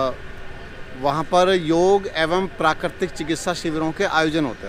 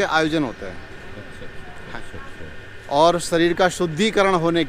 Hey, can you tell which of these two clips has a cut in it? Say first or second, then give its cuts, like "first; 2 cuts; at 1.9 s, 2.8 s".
second; 1 cut; at 2.0 s